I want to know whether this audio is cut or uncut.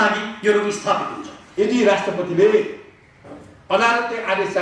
cut